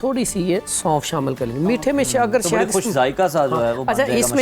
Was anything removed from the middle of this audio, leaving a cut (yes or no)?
no